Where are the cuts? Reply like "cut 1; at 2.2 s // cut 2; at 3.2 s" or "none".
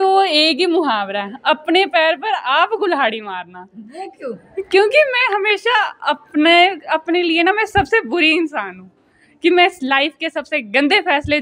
none